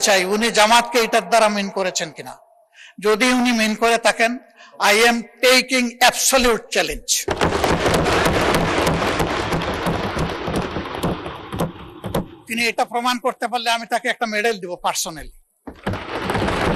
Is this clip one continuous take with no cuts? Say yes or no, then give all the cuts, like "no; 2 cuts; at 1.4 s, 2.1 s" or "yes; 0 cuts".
yes; 0 cuts